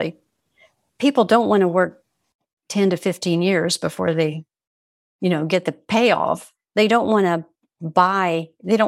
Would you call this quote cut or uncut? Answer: uncut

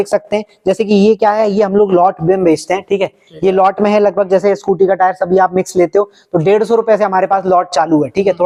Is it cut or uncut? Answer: uncut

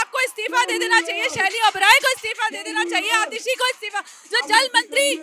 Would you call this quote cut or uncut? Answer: uncut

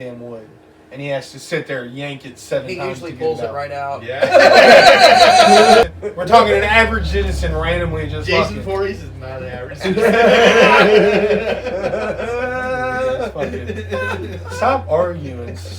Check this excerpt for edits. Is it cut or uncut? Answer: cut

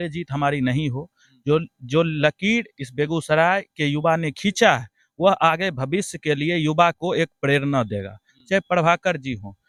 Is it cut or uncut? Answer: uncut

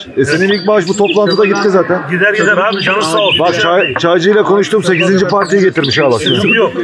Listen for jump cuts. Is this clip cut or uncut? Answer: uncut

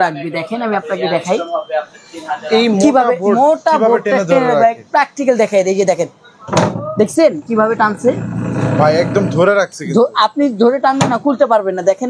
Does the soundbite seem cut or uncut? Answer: uncut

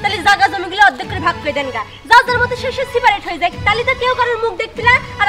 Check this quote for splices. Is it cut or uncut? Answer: uncut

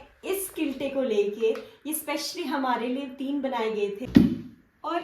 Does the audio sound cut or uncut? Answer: cut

